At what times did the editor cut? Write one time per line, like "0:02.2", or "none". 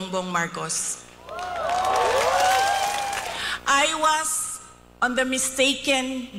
0:03.2

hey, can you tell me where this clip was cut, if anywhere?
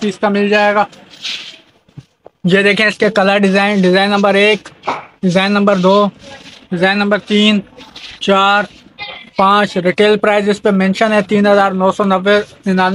none

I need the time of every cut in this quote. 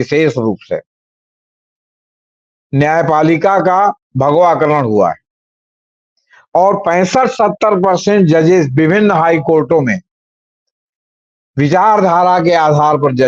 none

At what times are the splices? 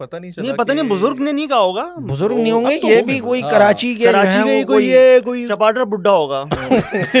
0:05.4

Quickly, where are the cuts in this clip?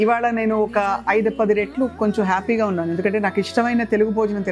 none

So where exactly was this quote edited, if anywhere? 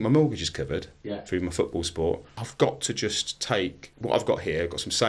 0:02.4
0:03.9

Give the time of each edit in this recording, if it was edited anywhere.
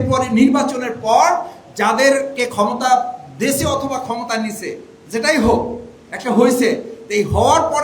0:04.9

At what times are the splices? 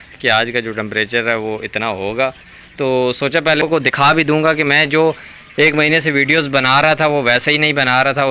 0:03.6

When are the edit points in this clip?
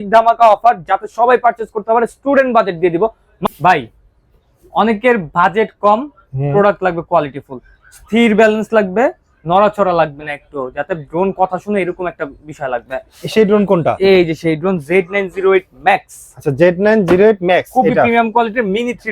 0:03.3

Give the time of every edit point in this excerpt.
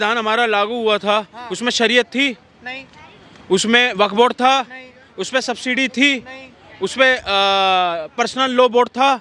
none

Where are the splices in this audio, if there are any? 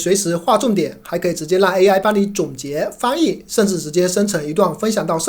none

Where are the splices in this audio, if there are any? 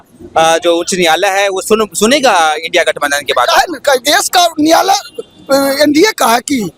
none

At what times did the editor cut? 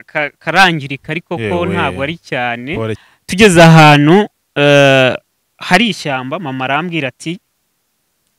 0:03.0

